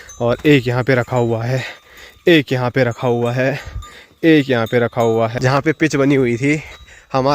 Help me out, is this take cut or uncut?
cut